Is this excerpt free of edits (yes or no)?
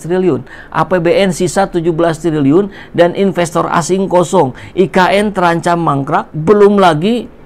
no